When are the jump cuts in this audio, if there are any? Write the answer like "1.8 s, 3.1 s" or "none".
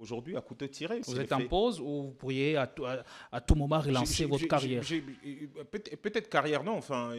1.0 s

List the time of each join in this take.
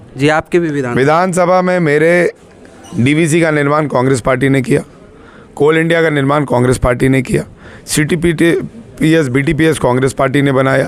none

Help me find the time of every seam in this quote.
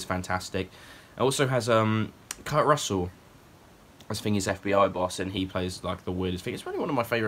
none

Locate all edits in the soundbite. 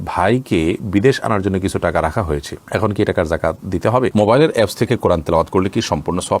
4.1 s

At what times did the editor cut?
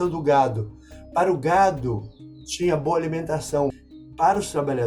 3.7 s

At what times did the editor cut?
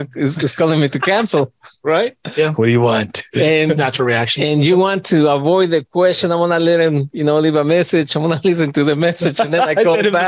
none

